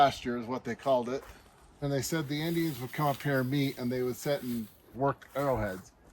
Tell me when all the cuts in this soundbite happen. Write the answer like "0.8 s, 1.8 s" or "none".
1.8 s, 4.9 s